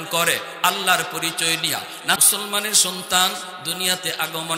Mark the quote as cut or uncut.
cut